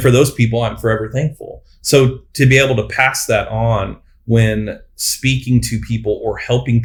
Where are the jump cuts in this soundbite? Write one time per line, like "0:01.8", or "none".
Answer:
none